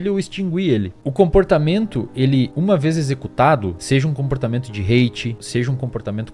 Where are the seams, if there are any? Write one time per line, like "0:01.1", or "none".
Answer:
0:01.0
0:02.5
0:03.8
0:05.4